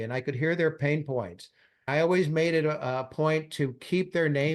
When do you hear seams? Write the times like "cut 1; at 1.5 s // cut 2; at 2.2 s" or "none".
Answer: cut 1; at 1.9 s